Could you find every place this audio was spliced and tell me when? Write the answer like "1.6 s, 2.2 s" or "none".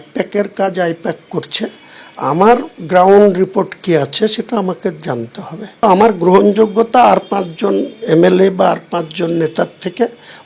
5.8 s